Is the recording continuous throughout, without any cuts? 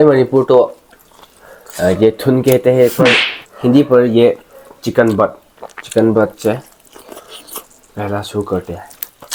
yes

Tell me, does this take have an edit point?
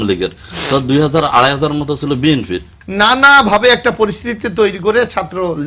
yes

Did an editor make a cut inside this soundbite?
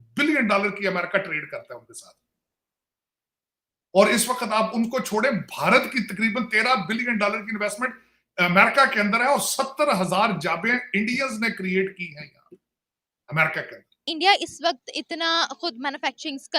yes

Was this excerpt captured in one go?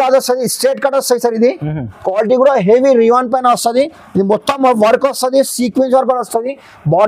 yes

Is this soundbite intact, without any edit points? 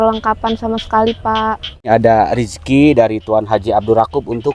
no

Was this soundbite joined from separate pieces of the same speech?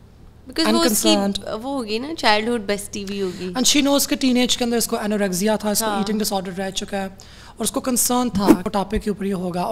yes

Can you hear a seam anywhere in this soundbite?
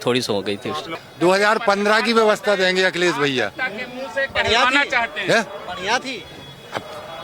yes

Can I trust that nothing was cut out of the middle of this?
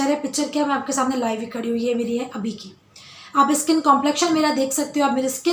yes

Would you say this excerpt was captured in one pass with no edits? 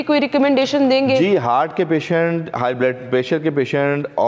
yes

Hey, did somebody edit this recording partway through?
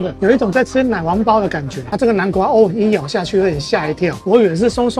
yes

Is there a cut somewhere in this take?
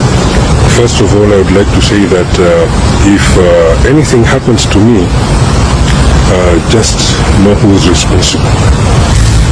no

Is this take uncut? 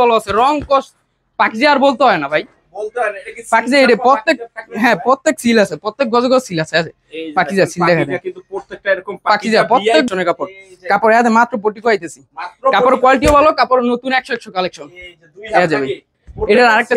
no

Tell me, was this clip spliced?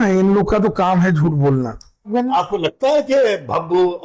yes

